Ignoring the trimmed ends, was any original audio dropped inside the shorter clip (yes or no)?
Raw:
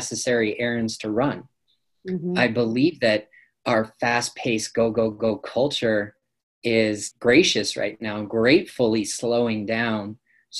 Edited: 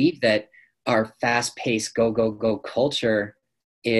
no